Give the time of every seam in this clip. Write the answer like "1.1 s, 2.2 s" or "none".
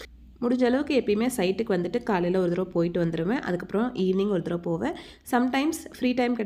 none

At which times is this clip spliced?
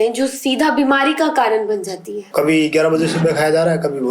2.3 s

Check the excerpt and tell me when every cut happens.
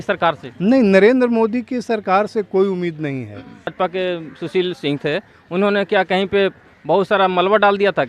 3.7 s

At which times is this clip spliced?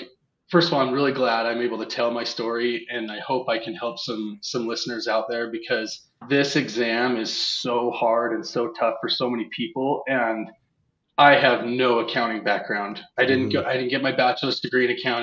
none

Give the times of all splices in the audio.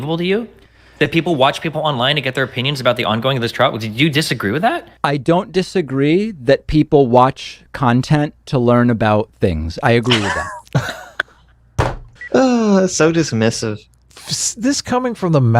12.1 s

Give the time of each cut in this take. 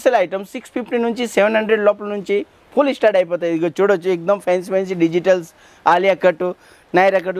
none

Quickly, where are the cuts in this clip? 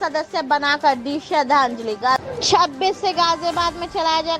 2.2 s

